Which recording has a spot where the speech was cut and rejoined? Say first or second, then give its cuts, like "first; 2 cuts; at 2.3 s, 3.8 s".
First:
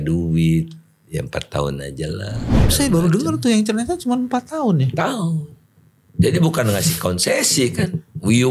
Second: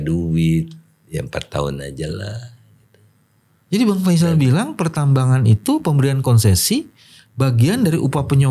first; 1 cut; at 2.7 s